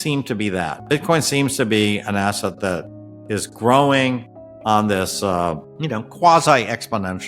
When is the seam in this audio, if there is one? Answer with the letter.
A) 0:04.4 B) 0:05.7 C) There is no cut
B